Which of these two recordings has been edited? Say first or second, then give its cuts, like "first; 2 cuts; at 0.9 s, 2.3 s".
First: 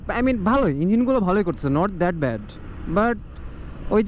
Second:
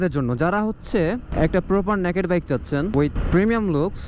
second; 1 cut; at 3.1 s